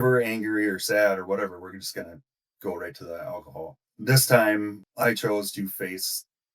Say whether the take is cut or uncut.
cut